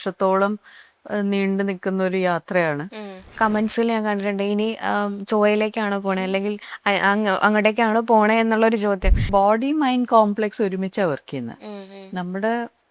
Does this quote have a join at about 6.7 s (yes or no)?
no